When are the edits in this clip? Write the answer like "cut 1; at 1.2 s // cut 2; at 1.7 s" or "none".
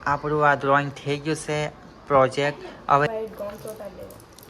cut 1; at 3.1 s

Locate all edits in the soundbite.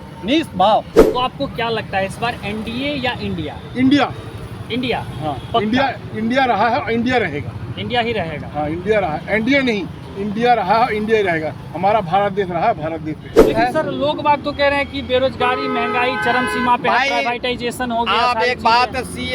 cut 1; at 1.0 s // cut 2; at 13.5 s

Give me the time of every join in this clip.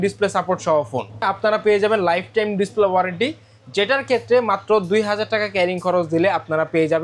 cut 1; at 1.2 s

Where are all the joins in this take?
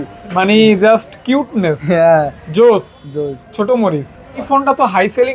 cut 1; at 4.4 s

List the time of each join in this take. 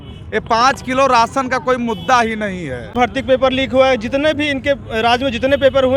cut 1; at 2.9 s

